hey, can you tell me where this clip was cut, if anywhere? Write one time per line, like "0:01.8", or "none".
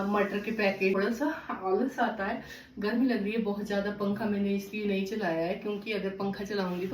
0:01.0